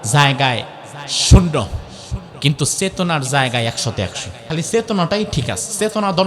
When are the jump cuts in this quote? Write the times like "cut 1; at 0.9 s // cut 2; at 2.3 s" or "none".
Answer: cut 1; at 4.3 s